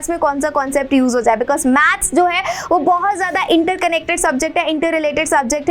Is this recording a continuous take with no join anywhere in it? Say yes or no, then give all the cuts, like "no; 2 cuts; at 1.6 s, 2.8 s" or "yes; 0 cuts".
yes; 0 cuts